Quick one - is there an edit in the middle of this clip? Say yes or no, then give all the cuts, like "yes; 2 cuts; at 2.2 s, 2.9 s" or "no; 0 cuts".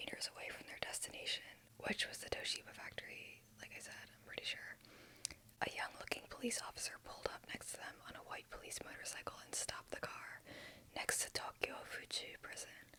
no; 0 cuts